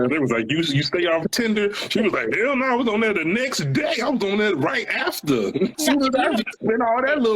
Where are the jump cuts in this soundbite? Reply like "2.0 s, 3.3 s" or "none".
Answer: 1.3 s, 5.8 s